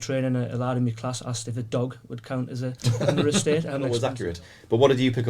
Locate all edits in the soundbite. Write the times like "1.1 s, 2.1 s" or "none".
4.2 s